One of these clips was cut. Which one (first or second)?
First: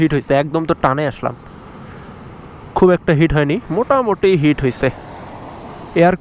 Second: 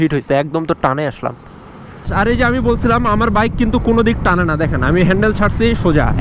second